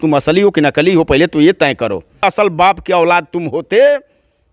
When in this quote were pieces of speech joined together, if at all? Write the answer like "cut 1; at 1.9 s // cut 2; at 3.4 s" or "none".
cut 1; at 2.2 s